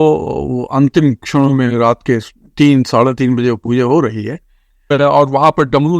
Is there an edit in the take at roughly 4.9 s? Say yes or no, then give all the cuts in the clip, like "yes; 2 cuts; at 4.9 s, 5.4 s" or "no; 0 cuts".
yes; 1 cut; at 4.9 s